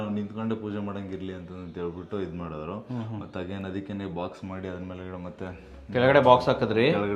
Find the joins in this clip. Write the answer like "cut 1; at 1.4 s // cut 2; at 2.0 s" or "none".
none